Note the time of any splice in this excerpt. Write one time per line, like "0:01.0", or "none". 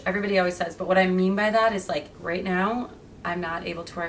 none